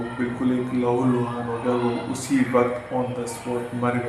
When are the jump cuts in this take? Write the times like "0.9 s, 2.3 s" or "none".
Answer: none